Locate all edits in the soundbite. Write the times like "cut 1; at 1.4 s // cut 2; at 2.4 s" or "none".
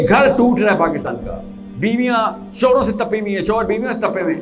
cut 1; at 1.1 s